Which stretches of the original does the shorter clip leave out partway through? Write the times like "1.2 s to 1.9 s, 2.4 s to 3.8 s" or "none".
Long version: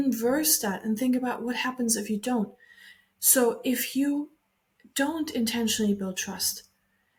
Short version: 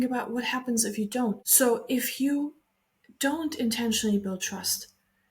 2.6 s to 3.2 s